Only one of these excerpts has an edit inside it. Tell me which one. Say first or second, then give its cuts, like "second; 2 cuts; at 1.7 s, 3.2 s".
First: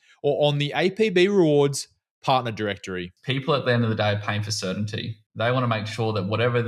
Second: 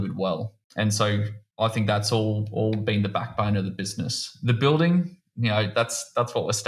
first; 1 cut; at 3.0 s